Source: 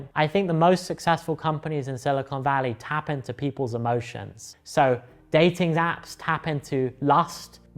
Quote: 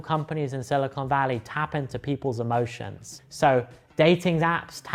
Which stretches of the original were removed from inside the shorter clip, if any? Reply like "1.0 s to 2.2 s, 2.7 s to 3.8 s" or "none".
none